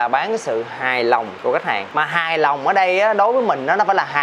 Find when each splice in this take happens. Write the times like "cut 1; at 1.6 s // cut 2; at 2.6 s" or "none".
none